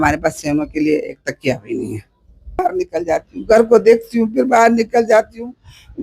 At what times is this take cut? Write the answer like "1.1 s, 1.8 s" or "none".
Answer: 2.6 s